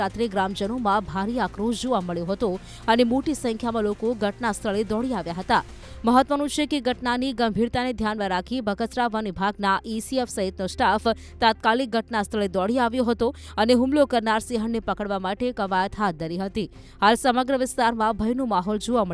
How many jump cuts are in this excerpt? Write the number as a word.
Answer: zero